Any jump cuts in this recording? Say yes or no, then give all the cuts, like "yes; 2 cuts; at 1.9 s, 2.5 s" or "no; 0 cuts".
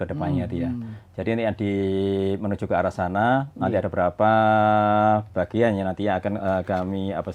no; 0 cuts